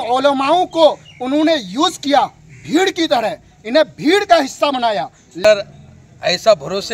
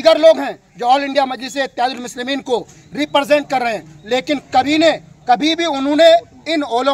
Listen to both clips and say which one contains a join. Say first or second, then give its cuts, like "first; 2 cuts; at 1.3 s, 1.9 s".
first; 1 cut; at 5.4 s